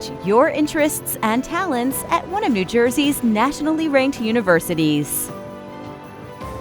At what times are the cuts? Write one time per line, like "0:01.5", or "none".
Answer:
0:05.1